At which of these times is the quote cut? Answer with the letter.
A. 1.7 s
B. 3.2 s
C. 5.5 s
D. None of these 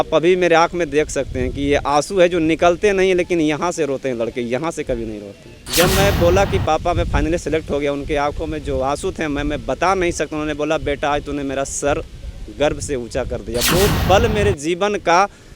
C